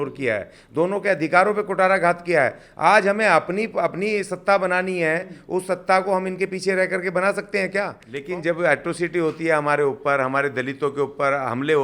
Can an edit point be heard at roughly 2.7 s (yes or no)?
no